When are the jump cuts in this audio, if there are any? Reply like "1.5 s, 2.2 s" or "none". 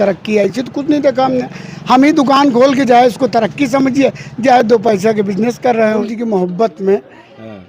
6.0 s